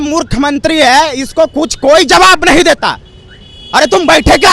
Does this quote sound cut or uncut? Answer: uncut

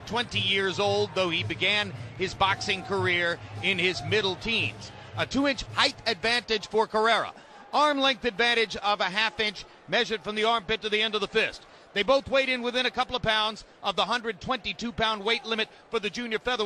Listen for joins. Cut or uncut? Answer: uncut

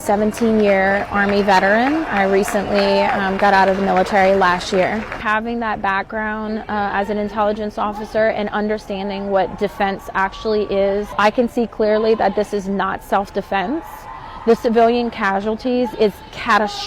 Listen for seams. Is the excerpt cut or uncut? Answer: uncut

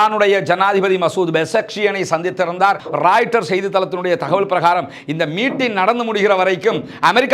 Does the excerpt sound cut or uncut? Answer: cut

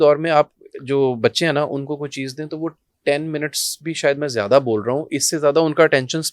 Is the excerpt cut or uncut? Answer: uncut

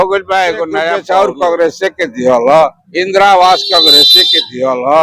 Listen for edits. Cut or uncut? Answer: cut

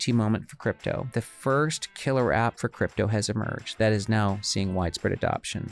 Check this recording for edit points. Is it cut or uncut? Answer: cut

